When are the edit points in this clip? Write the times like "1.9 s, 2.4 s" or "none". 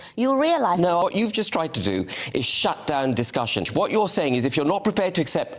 1.0 s, 3.7 s